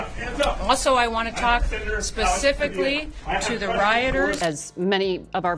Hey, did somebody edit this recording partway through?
yes; 1 cut; at 4.4 s

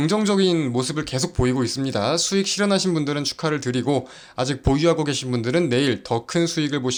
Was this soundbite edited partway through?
no; 0 cuts

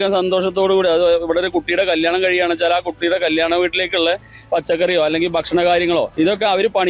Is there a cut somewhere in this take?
no; 0 cuts

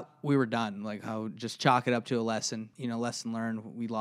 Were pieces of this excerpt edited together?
yes; 1 cut; at 2.7 s

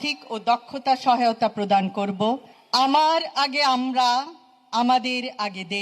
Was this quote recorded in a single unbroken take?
no; 1 cut; at 2.5 s

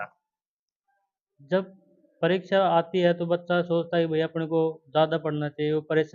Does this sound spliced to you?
no; 0 cuts

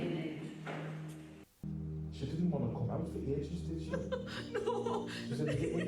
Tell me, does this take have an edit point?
yes; 1 cut; at 1.5 s

